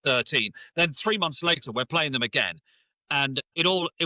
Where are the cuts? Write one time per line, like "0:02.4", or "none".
none